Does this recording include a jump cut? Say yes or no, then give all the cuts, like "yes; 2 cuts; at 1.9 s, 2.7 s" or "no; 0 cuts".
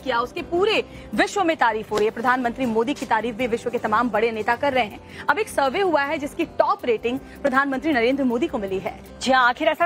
yes; 1 cut; at 1.6 s